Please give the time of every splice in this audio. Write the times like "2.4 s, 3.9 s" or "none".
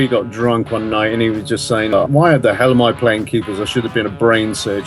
1.9 s